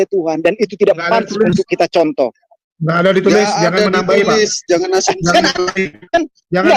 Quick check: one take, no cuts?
yes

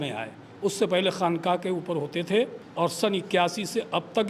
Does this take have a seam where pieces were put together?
yes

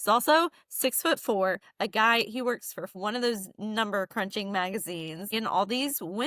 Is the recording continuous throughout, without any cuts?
no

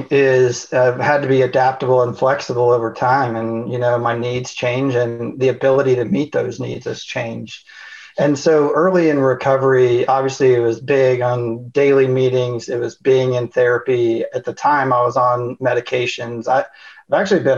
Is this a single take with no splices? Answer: yes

